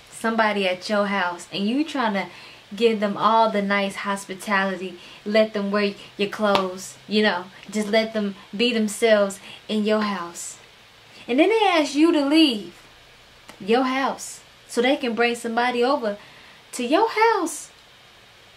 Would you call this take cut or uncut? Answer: uncut